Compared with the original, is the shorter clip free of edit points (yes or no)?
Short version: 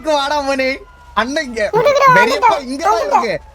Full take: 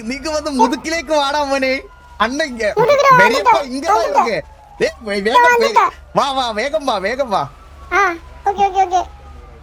yes